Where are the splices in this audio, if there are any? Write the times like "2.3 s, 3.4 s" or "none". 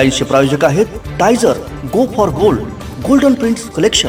none